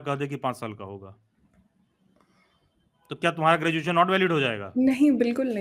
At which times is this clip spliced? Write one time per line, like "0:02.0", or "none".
none